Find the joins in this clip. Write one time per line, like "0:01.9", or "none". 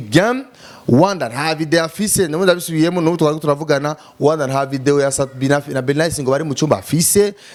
none

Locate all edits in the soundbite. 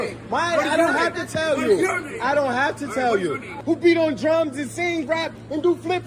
0:03.6

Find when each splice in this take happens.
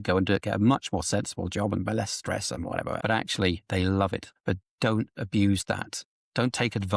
0:03.0
0:04.3
0:06.0

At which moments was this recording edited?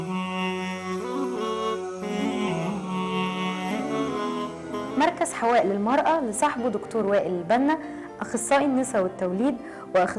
0:01.4
0:02.9

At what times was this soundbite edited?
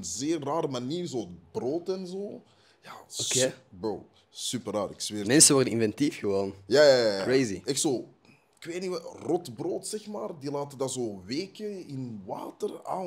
none

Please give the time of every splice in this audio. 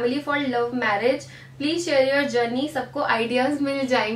none

